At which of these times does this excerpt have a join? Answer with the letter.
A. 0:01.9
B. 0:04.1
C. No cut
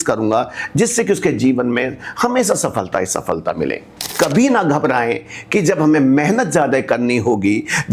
B